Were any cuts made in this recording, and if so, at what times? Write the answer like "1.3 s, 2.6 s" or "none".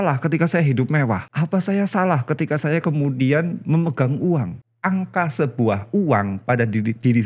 1.3 s, 4.6 s